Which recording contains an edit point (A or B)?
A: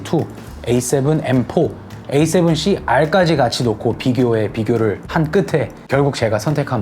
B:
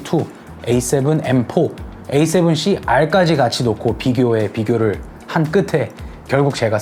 A